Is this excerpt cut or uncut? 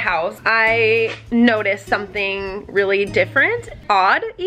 uncut